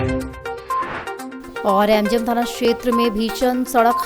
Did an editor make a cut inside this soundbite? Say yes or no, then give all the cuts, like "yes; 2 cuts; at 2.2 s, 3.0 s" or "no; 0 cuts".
yes; 1 cut; at 0.9 s